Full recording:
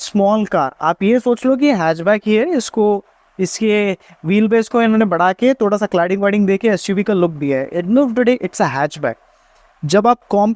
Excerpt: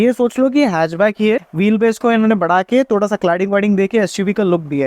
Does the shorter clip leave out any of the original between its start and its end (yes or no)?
yes